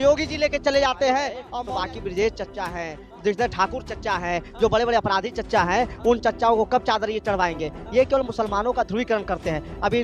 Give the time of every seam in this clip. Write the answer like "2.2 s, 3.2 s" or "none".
1.4 s